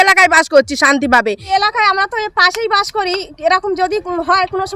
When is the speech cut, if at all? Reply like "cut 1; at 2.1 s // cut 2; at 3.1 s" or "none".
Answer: cut 1; at 1.5 s